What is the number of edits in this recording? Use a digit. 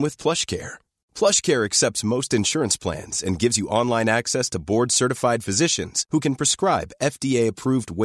0